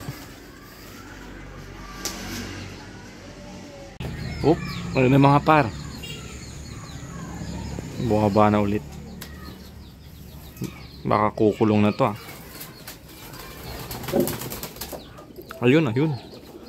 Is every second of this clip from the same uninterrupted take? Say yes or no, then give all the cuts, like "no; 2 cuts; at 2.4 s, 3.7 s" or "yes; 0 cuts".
no; 1 cut; at 4.0 s